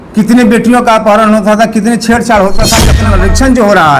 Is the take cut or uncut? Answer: cut